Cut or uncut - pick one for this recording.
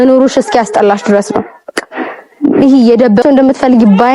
cut